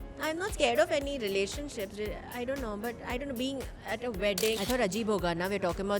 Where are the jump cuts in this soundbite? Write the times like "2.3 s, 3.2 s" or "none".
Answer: 4.6 s